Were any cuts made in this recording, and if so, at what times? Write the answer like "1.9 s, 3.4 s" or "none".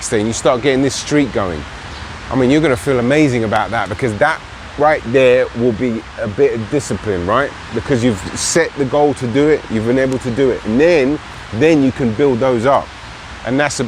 none